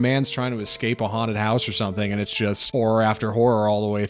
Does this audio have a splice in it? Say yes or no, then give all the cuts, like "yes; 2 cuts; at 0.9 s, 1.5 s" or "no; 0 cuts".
yes; 1 cut; at 2.6 s